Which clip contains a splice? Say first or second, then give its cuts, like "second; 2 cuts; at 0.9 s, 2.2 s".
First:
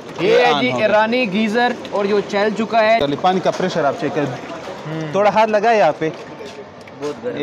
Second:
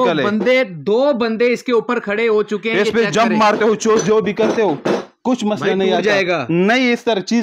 first; 1 cut; at 3.0 s